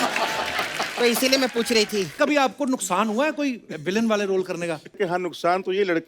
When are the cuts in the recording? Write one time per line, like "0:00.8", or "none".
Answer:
0:02.1
0:05.0